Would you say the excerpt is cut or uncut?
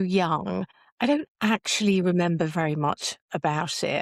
uncut